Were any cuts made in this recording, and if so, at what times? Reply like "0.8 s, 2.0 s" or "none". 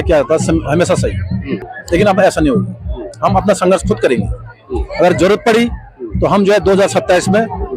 1.7 s